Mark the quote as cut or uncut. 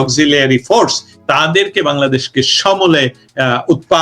cut